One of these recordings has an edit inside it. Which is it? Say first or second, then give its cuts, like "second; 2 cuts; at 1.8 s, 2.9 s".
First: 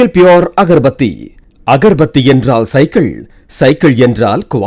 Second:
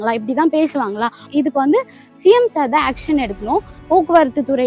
second; 2 cuts; at 1.3 s, 3.7 s